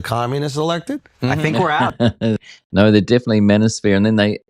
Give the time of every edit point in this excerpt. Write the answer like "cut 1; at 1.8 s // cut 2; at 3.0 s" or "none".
none